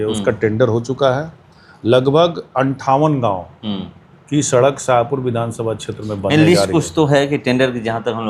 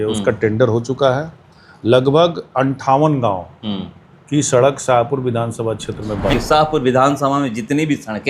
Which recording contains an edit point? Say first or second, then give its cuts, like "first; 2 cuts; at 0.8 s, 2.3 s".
second; 1 cut; at 6.3 s